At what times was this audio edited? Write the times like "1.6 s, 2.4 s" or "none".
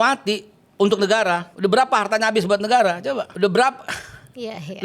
1.5 s